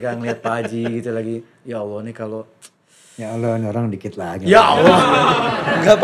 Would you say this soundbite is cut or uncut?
uncut